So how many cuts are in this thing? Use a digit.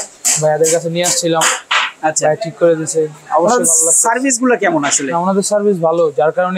0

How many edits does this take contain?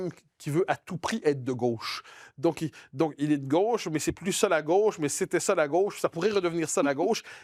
0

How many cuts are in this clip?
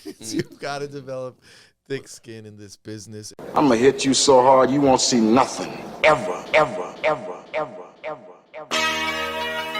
1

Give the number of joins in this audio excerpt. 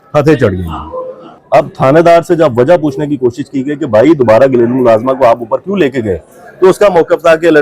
0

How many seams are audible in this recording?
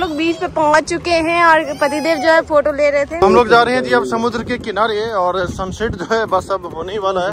1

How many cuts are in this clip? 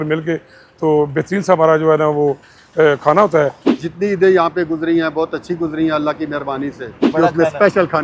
2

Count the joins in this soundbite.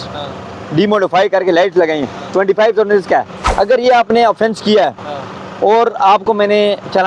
1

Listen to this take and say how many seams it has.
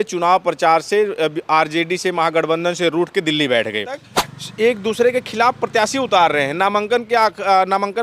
1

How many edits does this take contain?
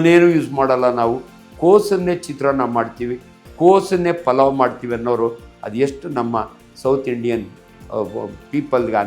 0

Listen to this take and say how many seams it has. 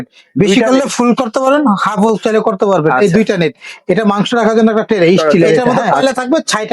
1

